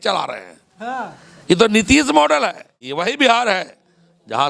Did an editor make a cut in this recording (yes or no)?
yes